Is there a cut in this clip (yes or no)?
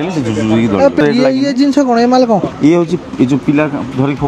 yes